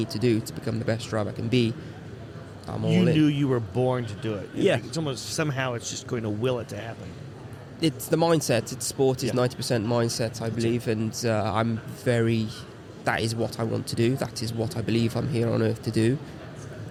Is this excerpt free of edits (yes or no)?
yes